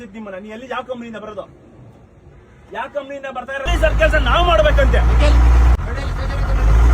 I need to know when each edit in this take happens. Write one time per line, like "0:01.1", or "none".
0:03.7